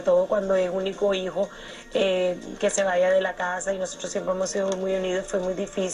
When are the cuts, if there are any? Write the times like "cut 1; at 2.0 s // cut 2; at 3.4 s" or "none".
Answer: cut 1; at 3.9 s